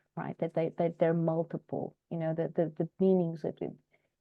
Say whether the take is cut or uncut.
uncut